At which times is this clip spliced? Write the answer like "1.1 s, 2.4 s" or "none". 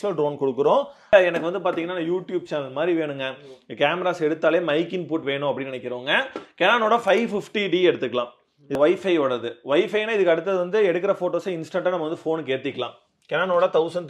1.1 s, 8.8 s